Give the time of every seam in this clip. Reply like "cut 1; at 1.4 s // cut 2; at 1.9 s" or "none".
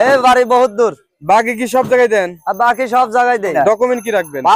cut 1; at 3.5 s